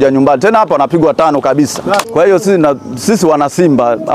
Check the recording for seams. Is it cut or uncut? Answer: cut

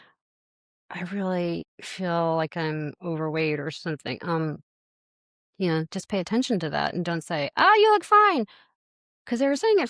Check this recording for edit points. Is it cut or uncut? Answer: cut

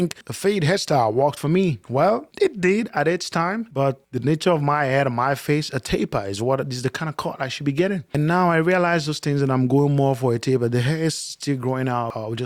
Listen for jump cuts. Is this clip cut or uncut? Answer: uncut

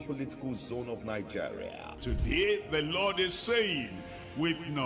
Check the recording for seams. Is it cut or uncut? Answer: cut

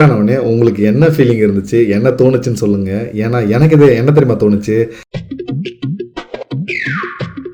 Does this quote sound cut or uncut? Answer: uncut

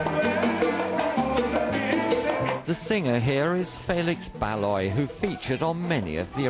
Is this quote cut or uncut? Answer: uncut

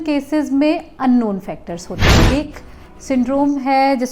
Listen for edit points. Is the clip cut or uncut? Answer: cut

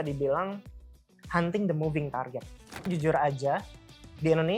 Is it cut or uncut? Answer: cut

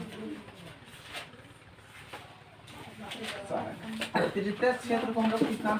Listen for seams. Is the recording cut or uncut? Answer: uncut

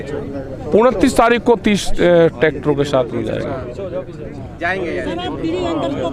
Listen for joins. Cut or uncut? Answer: uncut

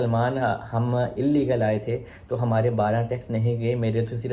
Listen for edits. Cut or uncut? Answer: uncut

